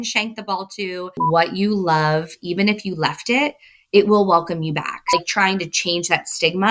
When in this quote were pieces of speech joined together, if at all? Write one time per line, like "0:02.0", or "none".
0:01.0
0:05.0